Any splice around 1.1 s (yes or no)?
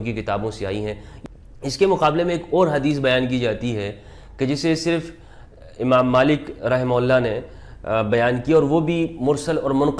yes